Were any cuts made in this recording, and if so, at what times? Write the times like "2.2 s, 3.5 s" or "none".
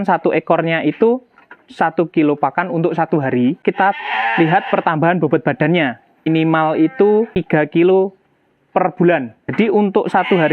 3.6 s, 6.3 s, 7.3 s, 9.5 s